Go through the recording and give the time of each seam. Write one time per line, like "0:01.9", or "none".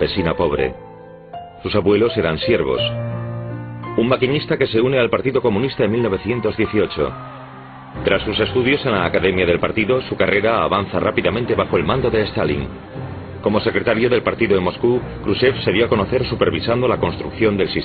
none